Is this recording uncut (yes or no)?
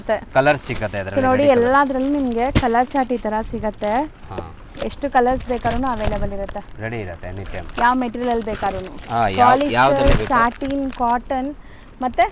yes